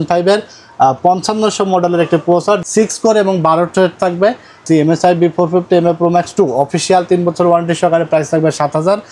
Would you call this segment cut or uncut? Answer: cut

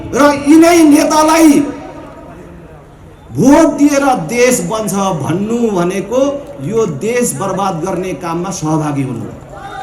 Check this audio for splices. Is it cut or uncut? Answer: uncut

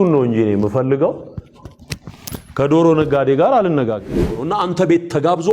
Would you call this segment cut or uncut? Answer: cut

